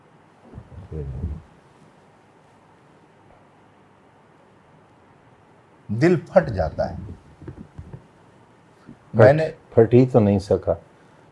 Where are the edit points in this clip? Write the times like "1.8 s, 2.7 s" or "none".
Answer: 4.9 s